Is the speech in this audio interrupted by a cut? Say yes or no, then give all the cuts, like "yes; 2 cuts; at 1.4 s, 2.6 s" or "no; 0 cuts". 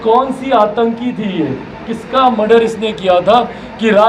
yes; 1 cut; at 1.9 s